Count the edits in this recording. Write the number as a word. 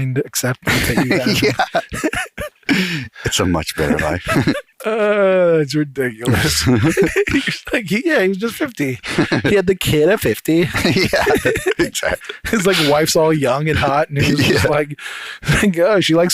two